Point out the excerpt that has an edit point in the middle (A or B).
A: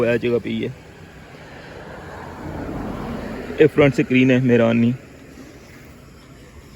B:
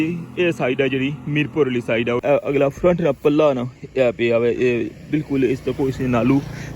B